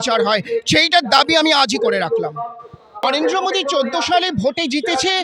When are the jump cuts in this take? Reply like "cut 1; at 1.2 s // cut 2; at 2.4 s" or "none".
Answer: cut 1; at 3.0 s